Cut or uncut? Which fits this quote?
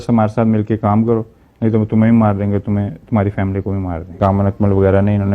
cut